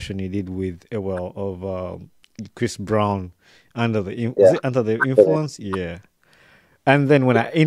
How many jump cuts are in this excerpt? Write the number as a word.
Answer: zero